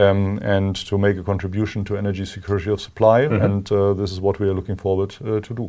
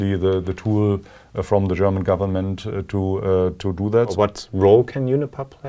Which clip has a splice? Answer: second; 1 cut; at 4.1 s

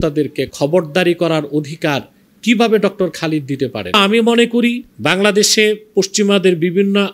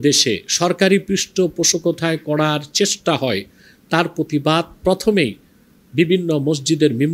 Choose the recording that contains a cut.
first; 2 cuts; at 4.0 s, 4.9 s

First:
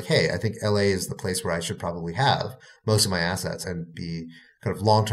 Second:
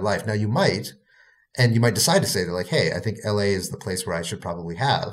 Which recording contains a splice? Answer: first; 1 cut; at 3.8 s

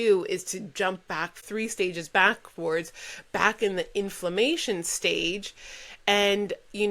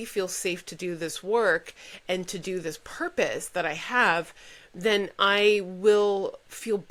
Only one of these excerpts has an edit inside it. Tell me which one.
first; 1 cut; at 1.4 s

